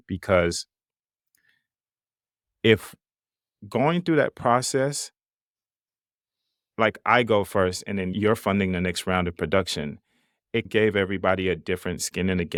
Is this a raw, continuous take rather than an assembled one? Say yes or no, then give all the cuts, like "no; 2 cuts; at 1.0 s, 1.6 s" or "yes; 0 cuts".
yes; 0 cuts